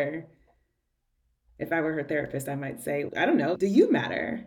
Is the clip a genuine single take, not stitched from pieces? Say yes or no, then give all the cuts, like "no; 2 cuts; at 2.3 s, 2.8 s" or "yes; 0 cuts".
no; 1 cut; at 3.5 s